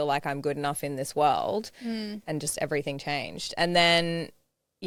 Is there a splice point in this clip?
no; 0 cuts

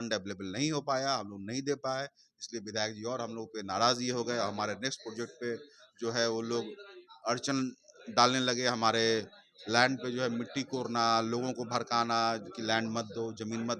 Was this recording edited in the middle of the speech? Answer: no; 0 cuts

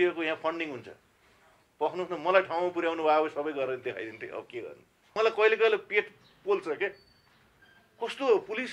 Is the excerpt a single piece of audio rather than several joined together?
no; 1 cut; at 5.1 s

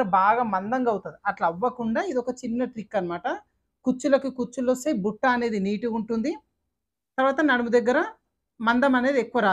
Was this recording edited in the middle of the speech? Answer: no; 0 cuts

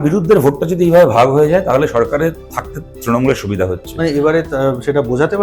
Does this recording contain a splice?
no; 0 cuts

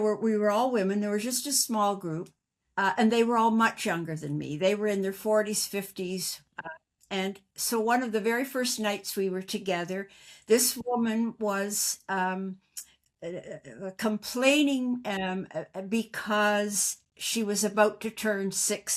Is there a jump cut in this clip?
no; 0 cuts

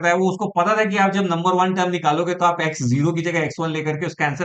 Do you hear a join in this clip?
no; 0 cuts

